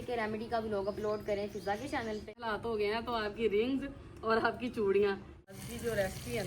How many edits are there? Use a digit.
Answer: 2